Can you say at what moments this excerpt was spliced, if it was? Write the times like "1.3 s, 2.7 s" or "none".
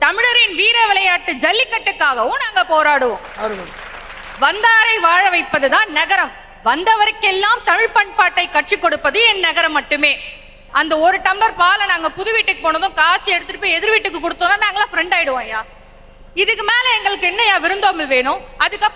10.6 s

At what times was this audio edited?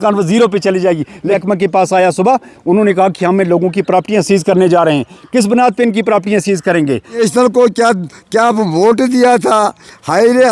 1.3 s, 7.2 s

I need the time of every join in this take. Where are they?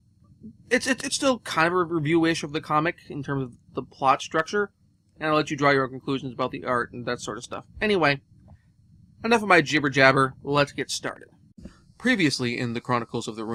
none

